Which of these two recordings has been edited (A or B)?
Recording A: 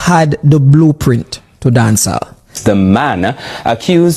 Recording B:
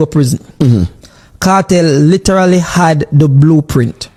A